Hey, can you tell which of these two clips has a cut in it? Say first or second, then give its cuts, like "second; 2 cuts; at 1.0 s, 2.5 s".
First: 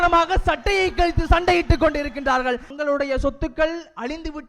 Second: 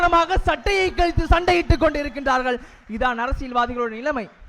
first; 1 cut; at 2.7 s